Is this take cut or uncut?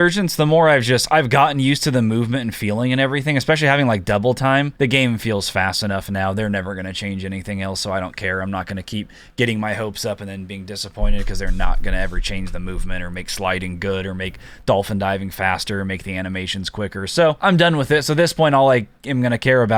cut